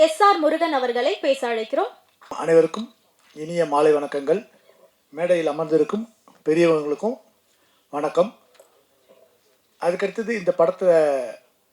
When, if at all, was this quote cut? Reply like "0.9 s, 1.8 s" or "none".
2.3 s